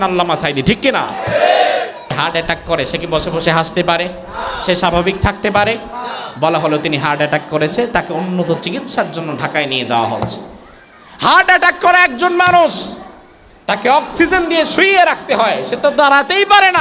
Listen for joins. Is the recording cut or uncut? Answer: cut